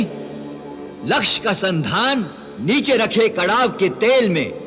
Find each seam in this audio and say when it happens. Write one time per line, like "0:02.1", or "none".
0:02.4